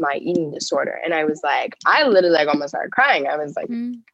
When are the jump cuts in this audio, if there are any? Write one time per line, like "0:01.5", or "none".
none

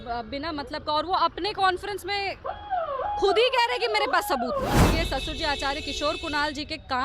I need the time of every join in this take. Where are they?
0:04.9

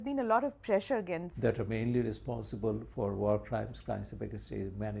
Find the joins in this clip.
none

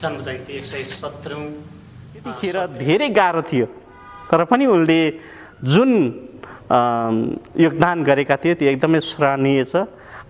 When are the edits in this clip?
0:02.4

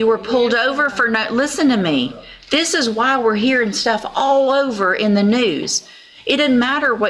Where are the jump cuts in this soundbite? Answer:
none

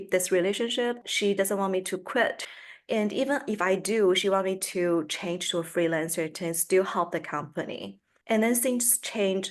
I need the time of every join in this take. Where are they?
0:01.1
0:02.4

